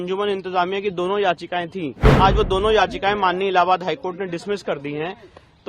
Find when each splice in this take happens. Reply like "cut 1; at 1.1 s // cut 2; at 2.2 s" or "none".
cut 1; at 2.1 s